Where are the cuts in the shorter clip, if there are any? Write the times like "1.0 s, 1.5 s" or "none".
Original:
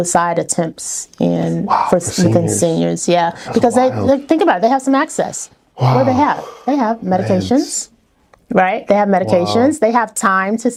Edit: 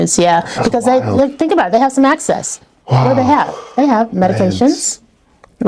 none